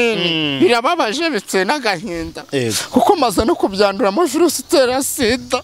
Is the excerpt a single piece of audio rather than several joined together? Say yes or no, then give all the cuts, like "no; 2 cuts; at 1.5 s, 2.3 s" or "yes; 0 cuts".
yes; 0 cuts